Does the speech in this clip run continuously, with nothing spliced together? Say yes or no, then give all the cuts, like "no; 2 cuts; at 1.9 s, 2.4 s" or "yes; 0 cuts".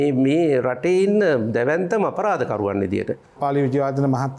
no; 1 cut; at 3.3 s